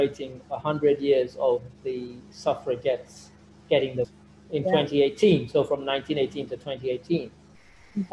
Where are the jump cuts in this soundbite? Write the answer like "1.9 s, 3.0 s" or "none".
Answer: 4.0 s